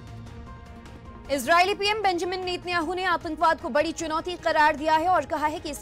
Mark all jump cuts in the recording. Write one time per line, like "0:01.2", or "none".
0:01.2